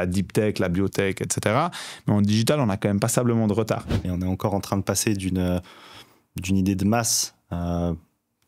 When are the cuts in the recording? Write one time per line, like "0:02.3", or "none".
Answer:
0:04.1